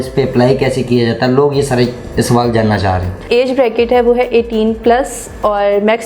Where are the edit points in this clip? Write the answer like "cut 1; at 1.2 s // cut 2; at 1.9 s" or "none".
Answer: cut 1; at 3.2 s

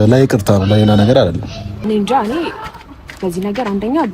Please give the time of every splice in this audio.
cut 1; at 1.7 s

